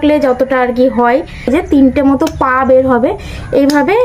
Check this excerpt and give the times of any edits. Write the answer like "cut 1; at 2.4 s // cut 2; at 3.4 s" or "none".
cut 1; at 1.5 s

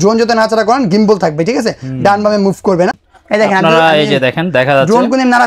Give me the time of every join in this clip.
cut 1; at 3.1 s

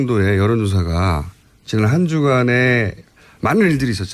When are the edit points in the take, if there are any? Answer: none

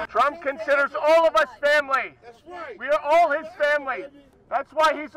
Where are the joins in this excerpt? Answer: none

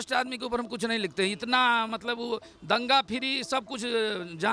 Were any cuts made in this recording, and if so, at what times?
none

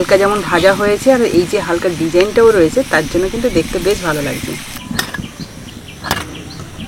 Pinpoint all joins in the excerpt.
cut 1; at 4.8 s

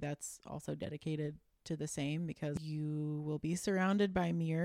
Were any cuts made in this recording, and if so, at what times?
cut 1; at 2.6 s

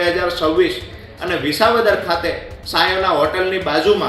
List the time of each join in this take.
cut 1; at 1.1 s

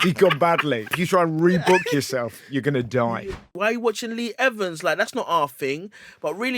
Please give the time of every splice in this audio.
cut 1; at 1.0 s // cut 2; at 3.2 s

